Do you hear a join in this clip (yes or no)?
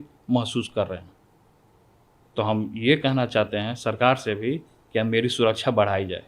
no